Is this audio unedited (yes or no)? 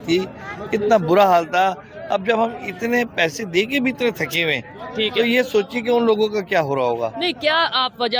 yes